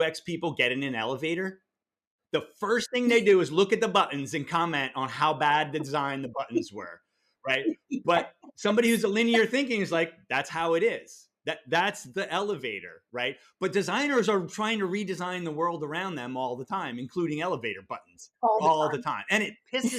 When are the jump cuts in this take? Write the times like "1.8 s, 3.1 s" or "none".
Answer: none